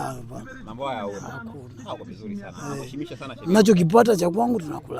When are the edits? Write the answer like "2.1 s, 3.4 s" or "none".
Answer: none

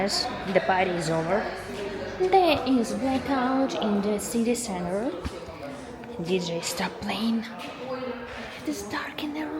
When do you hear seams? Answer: none

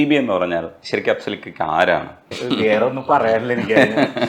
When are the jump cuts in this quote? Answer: none

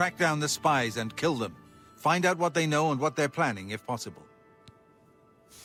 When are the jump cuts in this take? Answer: none

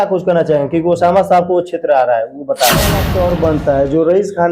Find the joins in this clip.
3.1 s

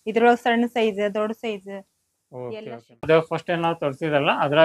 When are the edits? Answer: 2.9 s

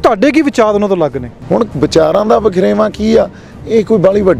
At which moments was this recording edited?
1.3 s

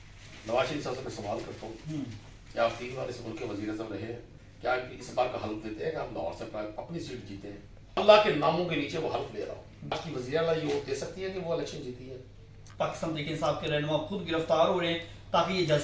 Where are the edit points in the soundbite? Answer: 8.0 s, 10.0 s, 12.6 s

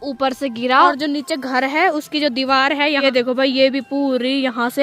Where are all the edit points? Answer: 0.9 s, 3.0 s

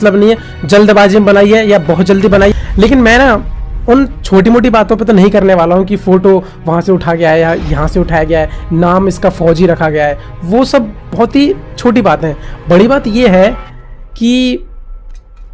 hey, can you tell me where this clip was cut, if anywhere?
2.5 s

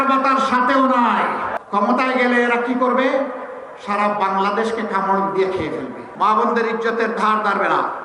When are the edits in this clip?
1.5 s, 6.0 s

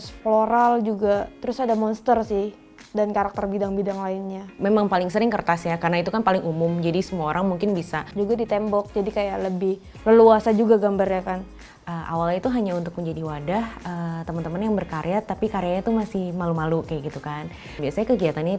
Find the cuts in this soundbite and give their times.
4.4 s, 11.6 s, 17.6 s

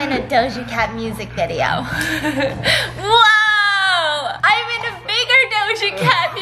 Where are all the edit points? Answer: none

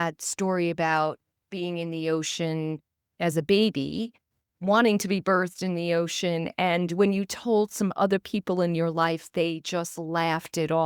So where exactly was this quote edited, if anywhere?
3.1 s

